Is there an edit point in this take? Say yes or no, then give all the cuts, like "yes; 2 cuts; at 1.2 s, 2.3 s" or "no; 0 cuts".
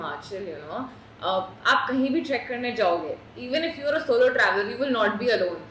no; 0 cuts